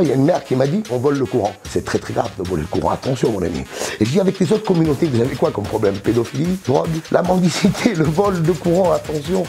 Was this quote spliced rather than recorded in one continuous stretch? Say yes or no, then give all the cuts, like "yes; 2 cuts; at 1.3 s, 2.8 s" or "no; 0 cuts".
yes; 1 cut; at 7.1 s